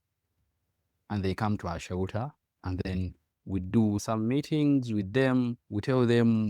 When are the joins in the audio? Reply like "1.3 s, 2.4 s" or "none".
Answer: 4.0 s